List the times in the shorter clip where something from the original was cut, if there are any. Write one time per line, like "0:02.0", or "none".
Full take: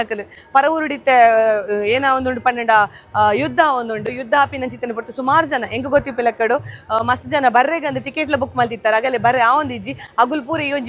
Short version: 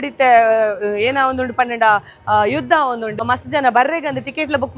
0:03.2